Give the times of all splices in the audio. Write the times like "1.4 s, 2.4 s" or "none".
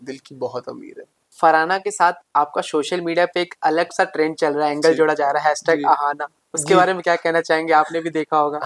1.2 s